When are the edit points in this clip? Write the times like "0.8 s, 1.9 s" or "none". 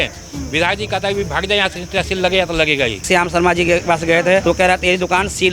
3.1 s, 4.4 s